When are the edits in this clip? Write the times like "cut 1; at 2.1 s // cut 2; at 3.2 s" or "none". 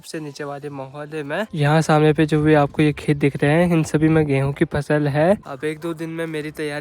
cut 1; at 1.5 s // cut 2; at 5.5 s